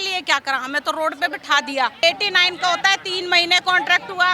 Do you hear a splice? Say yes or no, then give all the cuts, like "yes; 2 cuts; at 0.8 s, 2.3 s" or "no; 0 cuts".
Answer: yes; 1 cut; at 2.0 s